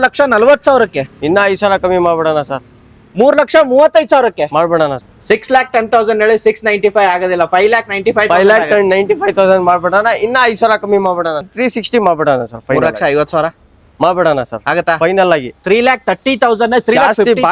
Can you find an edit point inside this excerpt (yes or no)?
yes